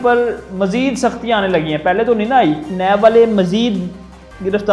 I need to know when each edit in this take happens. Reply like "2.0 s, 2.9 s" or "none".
none